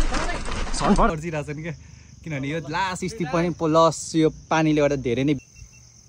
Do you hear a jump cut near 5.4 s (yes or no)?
yes